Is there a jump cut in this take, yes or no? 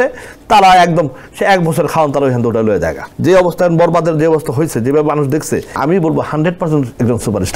yes